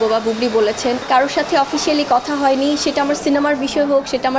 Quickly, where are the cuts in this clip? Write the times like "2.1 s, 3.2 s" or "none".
1.0 s